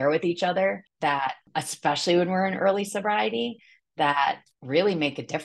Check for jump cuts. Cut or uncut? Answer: cut